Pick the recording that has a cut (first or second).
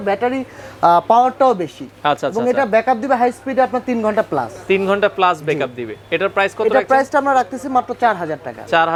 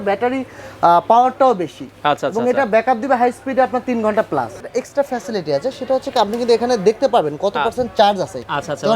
second